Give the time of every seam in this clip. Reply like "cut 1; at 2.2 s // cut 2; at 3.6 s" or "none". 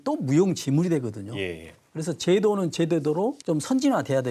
cut 1; at 3.4 s

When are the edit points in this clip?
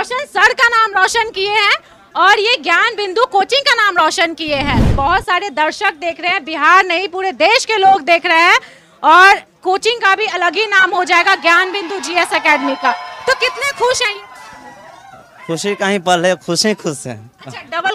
cut 1; at 4.9 s

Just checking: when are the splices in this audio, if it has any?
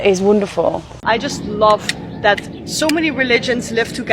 cut 1; at 1.0 s

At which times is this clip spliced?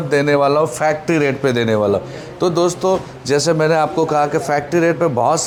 none

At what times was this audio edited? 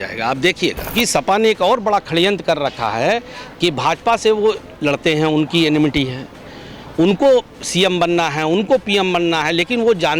cut 1; at 0.9 s

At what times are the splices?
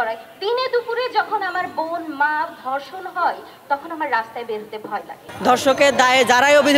cut 1; at 5.2 s

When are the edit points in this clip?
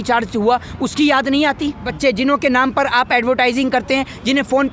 cut 1; at 1.9 s

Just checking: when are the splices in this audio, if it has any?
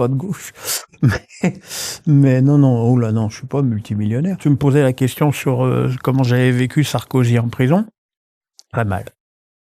cut 1; at 4.4 s

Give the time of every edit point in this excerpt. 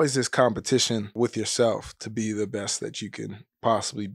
cut 1; at 1.1 s

